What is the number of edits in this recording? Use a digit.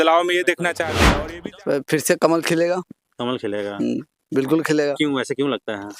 1